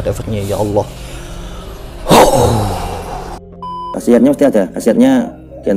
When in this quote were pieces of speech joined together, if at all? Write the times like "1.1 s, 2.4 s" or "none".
3.9 s